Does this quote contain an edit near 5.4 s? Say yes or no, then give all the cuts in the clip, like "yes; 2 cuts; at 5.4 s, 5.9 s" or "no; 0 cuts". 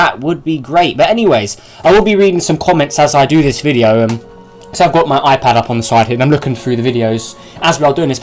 yes; 1 cut; at 5.4 s